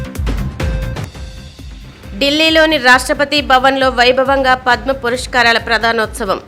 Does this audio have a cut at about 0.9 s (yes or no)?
yes